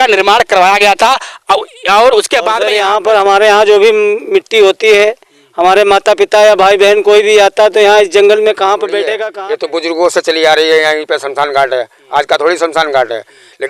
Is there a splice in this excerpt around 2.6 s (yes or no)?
yes